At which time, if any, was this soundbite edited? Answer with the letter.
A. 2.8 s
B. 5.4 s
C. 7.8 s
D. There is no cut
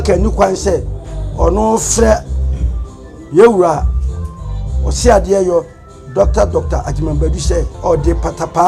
C